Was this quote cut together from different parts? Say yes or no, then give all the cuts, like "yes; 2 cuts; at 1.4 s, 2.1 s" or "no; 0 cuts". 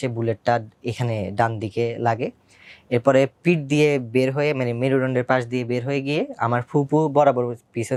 no; 0 cuts